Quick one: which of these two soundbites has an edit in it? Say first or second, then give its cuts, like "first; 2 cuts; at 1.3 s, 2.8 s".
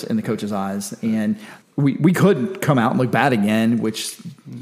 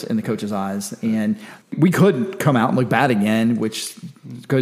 second; 1 cut; at 1.7 s